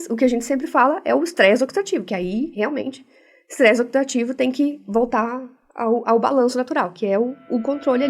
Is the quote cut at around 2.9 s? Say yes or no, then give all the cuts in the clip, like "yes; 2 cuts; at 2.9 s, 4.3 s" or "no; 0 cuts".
no; 0 cuts